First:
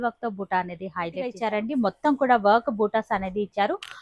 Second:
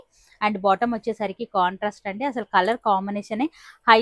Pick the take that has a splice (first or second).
first